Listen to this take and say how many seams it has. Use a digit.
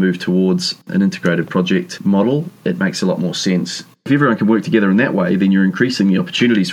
3